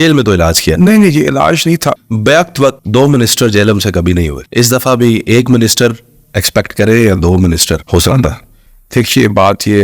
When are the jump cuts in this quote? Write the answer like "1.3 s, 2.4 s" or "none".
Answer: 2.0 s, 2.8 s, 4.4 s, 7.8 s

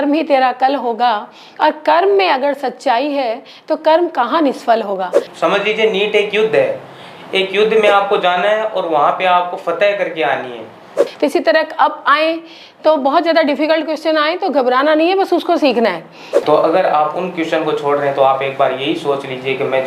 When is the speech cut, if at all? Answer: 5.2 s, 11.0 s, 16.3 s

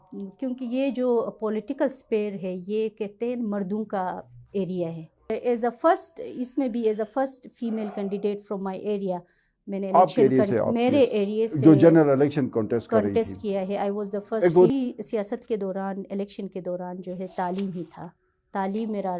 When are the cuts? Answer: 5.3 s, 14.7 s

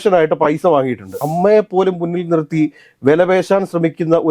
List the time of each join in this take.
1.2 s

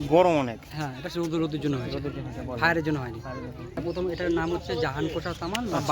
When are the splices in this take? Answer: 3.8 s

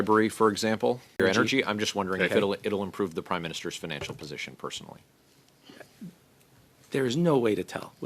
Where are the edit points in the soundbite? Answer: 1.2 s

